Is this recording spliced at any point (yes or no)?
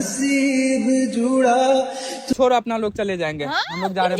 yes